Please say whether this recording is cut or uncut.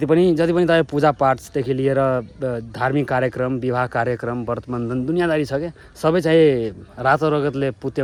uncut